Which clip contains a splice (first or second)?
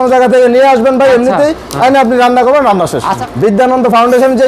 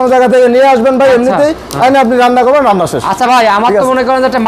first